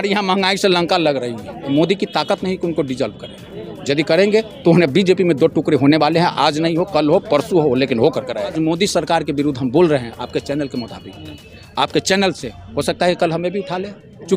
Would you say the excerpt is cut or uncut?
cut